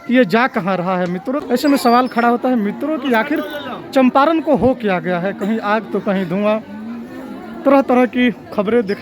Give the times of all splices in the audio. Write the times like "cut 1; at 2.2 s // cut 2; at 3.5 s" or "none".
cut 1; at 1.4 s